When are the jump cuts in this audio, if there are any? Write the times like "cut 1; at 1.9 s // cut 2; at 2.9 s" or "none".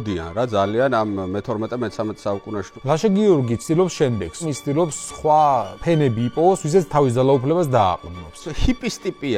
cut 1; at 2.7 s // cut 2; at 4.5 s // cut 3; at 5.7 s // cut 4; at 8.5 s